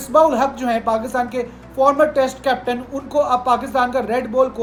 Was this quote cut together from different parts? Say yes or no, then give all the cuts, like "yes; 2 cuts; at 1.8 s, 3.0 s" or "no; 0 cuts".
no; 0 cuts